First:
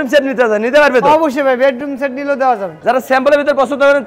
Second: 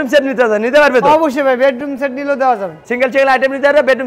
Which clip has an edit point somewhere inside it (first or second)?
first